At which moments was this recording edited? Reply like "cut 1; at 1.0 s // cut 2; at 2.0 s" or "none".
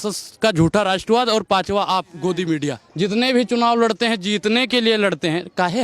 cut 1; at 2.8 s